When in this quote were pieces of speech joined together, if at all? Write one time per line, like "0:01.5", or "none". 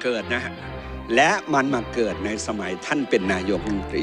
none